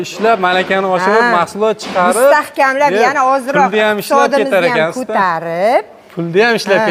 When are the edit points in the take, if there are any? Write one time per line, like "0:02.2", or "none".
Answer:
none